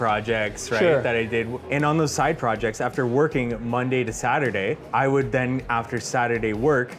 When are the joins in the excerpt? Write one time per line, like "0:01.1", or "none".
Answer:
0:01.6
0:04.8